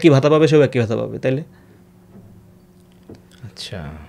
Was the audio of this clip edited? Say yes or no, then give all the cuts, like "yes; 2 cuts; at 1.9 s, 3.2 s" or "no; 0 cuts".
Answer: no; 0 cuts